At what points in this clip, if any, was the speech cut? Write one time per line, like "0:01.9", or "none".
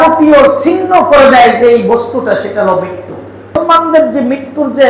0:03.6